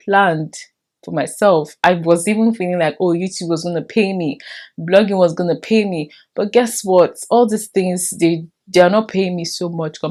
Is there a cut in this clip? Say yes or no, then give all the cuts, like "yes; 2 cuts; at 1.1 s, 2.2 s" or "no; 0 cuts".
no; 0 cuts